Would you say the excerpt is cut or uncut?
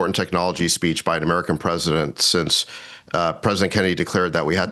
uncut